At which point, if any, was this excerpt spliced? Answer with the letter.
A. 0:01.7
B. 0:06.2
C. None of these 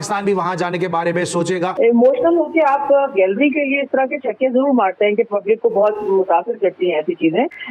A